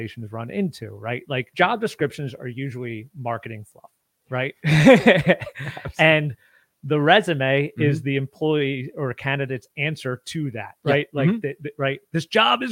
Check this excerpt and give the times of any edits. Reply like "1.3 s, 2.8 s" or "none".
1.5 s

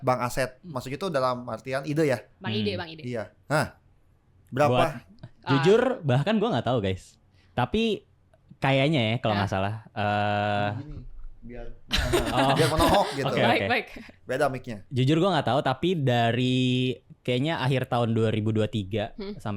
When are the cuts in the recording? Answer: none

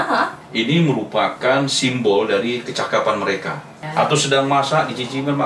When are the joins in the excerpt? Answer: 3.8 s

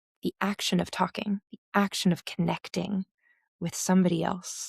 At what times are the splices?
1.5 s

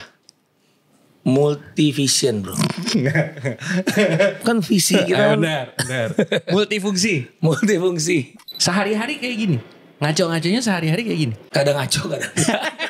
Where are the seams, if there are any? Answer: 8.4 s, 11.4 s

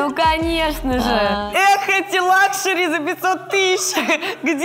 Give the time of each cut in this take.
1.4 s

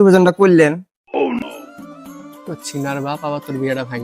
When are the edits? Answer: 1.4 s

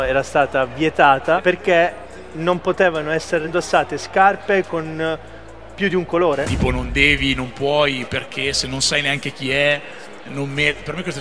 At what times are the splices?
1.4 s, 3.5 s, 6.5 s

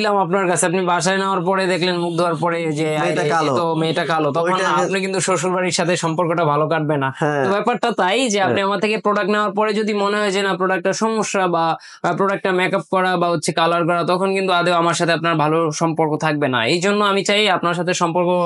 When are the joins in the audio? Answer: none

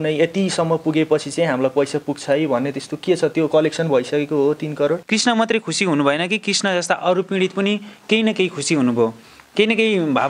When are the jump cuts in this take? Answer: 5.0 s

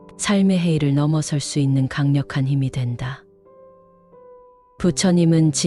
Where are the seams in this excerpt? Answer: 3.2 s, 4.8 s

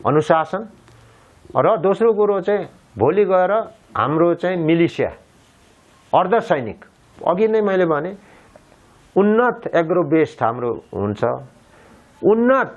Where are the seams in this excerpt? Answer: none

